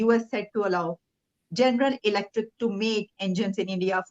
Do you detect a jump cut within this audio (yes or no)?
no